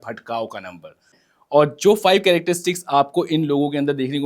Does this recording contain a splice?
no; 0 cuts

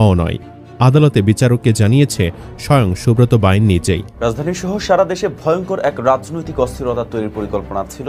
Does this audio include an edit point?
yes; 1 cut; at 4.1 s

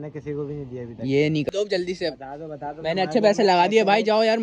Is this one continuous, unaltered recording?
no; 1 cut; at 1.5 s

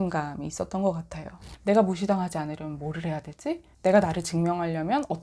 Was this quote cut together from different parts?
yes; 2 cuts; at 1.5 s, 3.7 s

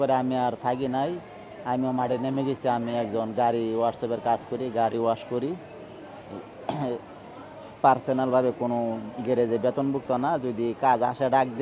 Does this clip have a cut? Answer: no; 0 cuts

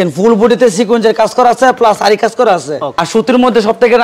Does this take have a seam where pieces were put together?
yes; 1 cut; at 3.0 s

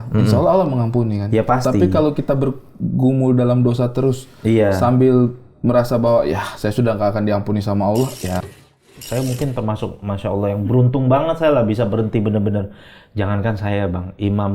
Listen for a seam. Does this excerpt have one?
yes; 1 cut; at 8.5 s

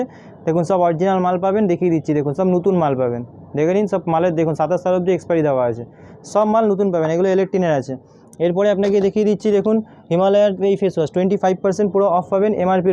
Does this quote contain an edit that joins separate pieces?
no; 0 cuts

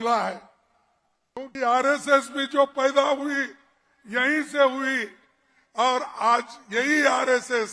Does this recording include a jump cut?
yes; 1 cut; at 1.4 s

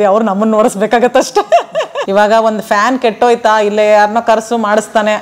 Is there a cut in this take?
yes; 1 cut; at 2.0 s

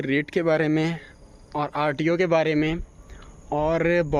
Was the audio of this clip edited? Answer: no; 0 cuts

